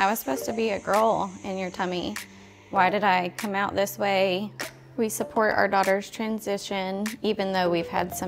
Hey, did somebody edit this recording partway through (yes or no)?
yes